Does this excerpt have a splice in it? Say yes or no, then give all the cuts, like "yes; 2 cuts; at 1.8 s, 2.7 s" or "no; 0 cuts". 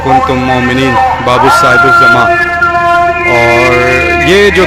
no; 0 cuts